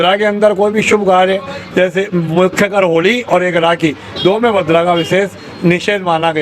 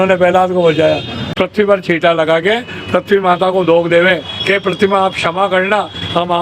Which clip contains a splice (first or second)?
second